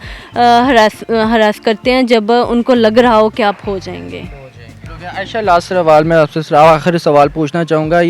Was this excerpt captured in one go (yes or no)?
yes